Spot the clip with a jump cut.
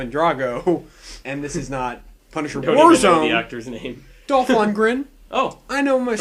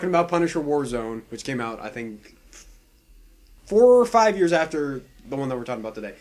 second; 1 cut; at 1.1 s

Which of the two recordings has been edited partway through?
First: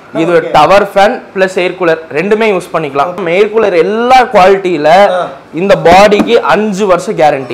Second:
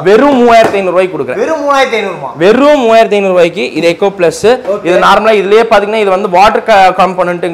first; 1 cut; at 3.2 s

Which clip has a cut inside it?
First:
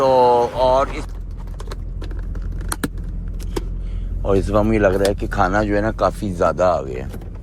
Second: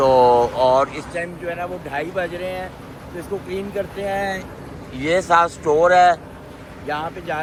first; 1 cut; at 1.0 s

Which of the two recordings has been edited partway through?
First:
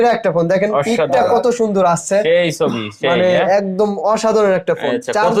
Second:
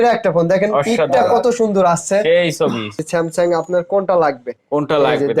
second; 1 cut; at 3.0 s

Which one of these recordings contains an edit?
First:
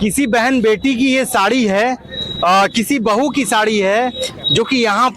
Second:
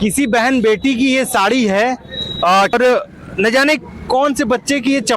second; 1 cut; at 2.7 s

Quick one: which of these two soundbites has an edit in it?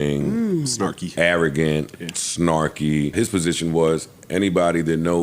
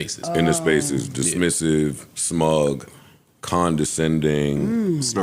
first; 1 cut; at 3.1 s

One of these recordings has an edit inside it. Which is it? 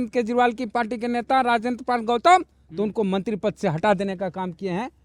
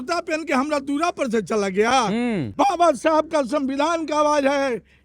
second; 1 cut; at 2.5 s

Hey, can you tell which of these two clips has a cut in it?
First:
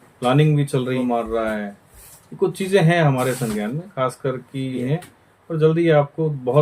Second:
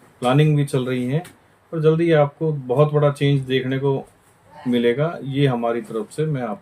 first; 2 cuts; at 1.0 s, 4.8 s

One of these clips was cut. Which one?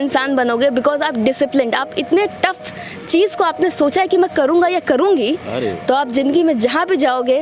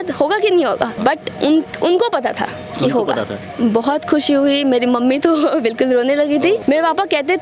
second; 2 cuts; at 0.9 s, 6.6 s

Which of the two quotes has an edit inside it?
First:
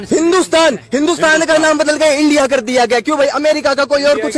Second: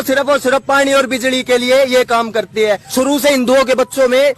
second; 1 cut; at 2.9 s

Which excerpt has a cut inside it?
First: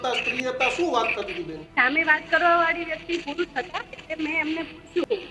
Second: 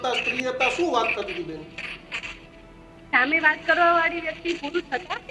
first; 1 cut; at 1.6 s

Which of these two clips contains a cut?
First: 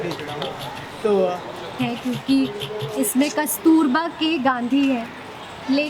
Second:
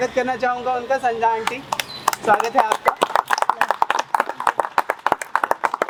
first; 1 cut; at 1.7 s

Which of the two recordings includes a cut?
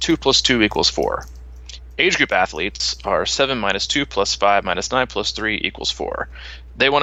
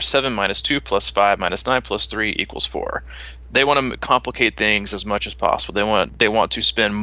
second; 1 cut; at 6.1 s

